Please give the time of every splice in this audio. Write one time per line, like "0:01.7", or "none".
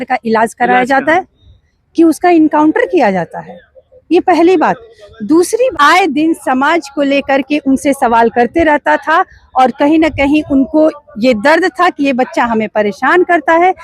0:05.7